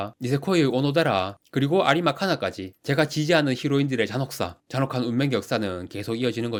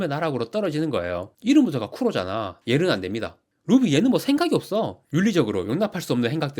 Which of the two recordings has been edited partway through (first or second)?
second